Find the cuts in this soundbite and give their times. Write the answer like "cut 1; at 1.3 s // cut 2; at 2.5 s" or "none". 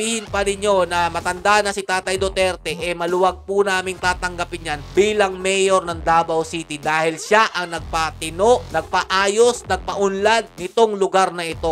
none